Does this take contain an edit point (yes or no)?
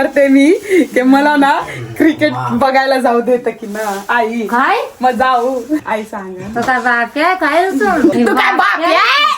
yes